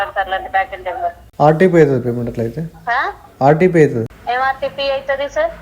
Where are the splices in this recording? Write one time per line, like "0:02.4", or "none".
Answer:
0:01.2
0:04.2